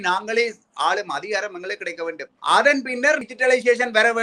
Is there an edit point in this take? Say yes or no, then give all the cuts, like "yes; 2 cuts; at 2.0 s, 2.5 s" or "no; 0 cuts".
yes; 2 cuts; at 2.3 s, 3.3 s